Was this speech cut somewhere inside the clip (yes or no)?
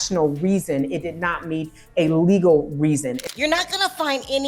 yes